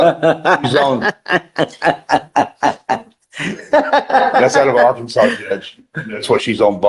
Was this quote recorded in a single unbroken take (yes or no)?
yes